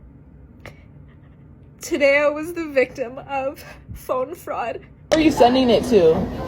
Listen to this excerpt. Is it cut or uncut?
cut